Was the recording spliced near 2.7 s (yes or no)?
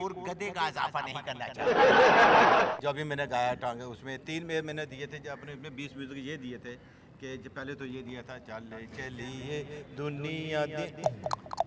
yes